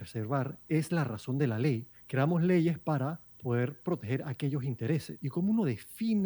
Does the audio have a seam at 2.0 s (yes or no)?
yes